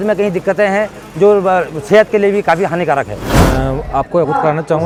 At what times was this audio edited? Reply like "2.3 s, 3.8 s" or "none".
none

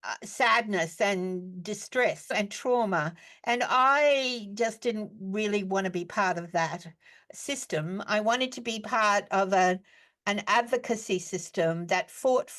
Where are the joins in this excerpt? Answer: none

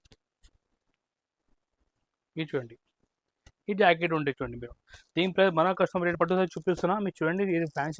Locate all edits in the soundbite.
6.1 s

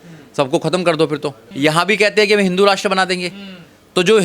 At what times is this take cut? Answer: 1.5 s

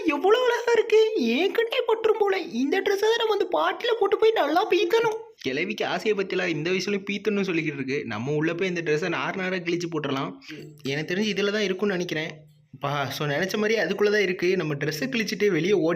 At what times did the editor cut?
10.7 s

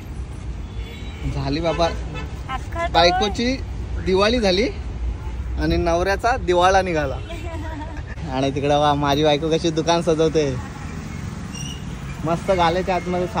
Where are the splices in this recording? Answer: 8.2 s

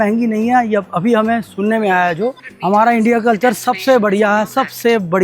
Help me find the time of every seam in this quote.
2.5 s

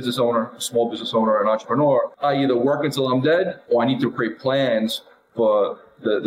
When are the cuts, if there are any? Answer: 2.1 s

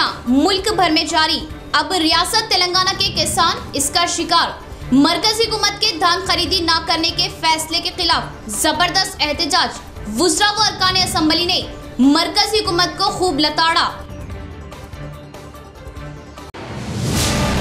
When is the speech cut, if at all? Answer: none

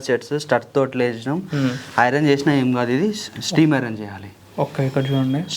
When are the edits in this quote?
none

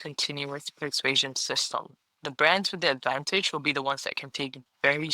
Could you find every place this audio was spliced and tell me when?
2.2 s

